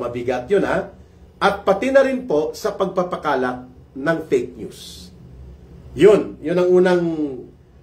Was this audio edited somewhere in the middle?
no; 0 cuts

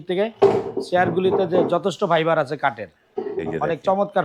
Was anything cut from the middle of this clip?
no; 0 cuts

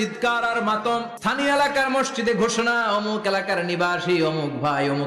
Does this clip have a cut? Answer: yes; 1 cut; at 1.1 s

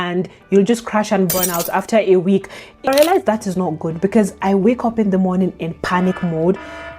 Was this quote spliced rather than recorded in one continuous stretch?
yes; 1 cut; at 2.9 s

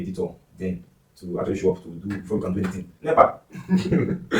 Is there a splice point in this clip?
yes; 1 cut; at 2.9 s

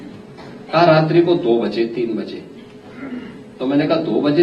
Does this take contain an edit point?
no; 0 cuts

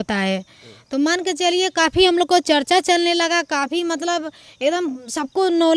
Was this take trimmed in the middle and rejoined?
no; 0 cuts

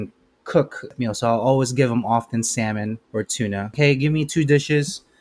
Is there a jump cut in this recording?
yes; 2 cuts; at 0.9 s, 3.6 s

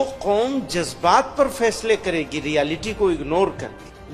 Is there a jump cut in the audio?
no; 0 cuts

